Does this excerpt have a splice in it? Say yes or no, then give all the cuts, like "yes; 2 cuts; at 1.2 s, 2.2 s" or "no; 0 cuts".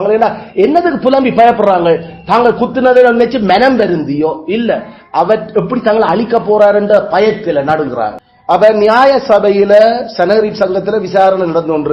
yes; 1 cut; at 8.3 s